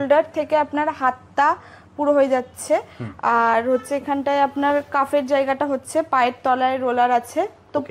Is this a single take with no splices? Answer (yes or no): yes